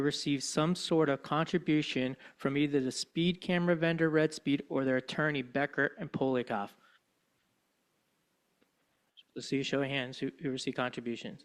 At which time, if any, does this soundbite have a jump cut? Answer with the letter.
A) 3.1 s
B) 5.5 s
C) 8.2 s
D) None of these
D